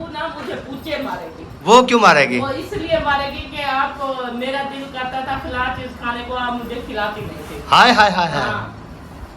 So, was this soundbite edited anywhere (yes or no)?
no